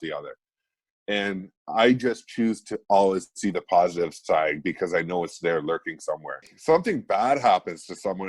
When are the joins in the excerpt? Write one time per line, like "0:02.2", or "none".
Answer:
0:06.5